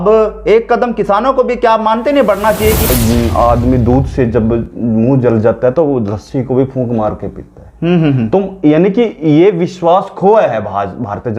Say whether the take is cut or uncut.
cut